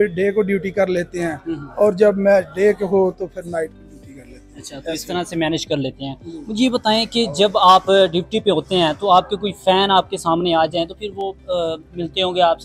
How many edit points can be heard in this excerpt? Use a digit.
0